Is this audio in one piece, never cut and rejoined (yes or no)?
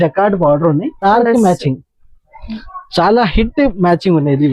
no